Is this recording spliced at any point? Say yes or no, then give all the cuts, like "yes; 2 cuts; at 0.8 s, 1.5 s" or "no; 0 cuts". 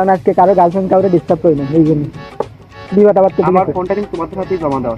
no; 0 cuts